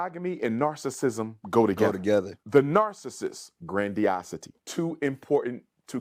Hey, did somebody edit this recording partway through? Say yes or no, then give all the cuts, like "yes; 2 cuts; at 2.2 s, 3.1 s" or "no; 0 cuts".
no; 0 cuts